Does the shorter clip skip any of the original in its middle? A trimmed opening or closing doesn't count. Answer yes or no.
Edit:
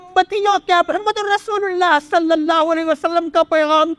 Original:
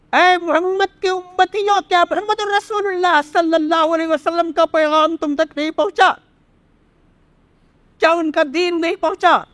no